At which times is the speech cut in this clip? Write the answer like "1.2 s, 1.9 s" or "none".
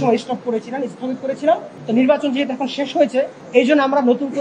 1.7 s, 3.4 s